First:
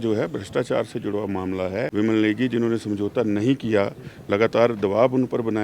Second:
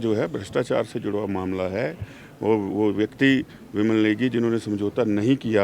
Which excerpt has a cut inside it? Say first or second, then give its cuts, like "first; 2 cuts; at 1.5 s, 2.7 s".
first; 1 cut; at 1.9 s